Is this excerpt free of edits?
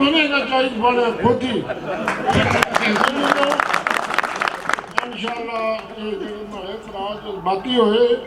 yes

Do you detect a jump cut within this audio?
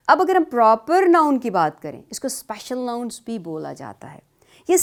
no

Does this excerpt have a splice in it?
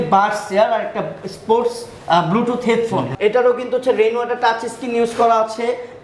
yes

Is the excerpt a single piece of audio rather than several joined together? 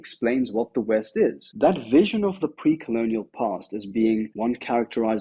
no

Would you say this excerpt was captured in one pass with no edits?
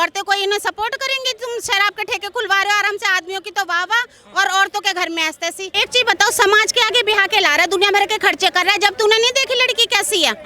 no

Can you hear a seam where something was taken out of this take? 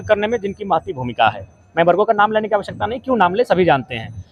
no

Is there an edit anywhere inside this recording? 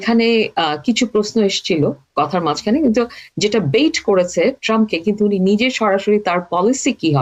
no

